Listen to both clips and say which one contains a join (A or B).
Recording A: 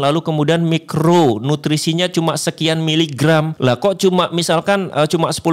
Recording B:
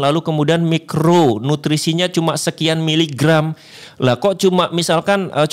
A